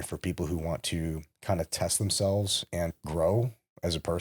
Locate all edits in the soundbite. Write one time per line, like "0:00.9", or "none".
0:02.9